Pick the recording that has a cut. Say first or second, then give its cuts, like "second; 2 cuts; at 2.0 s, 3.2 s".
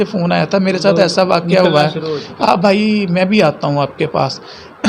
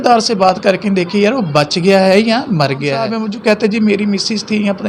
second; 1 cut; at 3.2 s